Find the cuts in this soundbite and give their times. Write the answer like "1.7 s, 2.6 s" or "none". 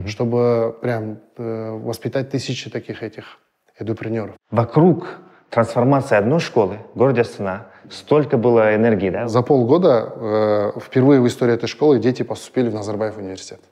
4.4 s, 9.2 s